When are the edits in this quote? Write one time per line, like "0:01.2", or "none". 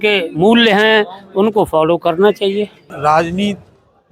0:02.8